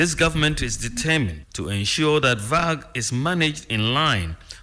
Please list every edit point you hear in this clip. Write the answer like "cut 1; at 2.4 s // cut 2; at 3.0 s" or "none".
cut 1; at 1.5 s